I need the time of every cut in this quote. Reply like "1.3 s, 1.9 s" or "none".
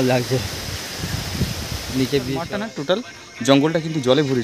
2.5 s